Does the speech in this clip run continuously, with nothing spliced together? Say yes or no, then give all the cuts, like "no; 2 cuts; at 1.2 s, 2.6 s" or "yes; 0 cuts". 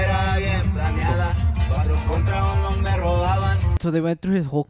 no; 1 cut; at 3.8 s